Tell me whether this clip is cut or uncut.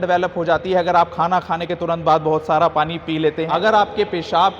cut